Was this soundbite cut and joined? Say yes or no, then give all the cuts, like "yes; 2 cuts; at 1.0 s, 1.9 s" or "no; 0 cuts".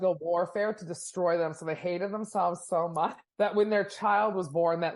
no; 0 cuts